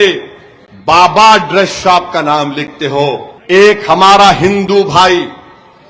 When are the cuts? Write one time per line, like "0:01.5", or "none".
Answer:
0:03.3